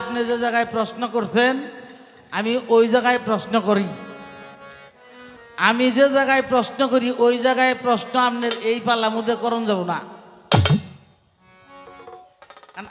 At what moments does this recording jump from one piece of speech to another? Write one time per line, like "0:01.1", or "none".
none